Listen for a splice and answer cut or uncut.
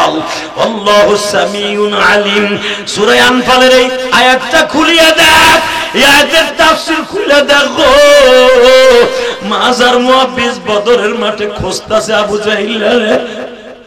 uncut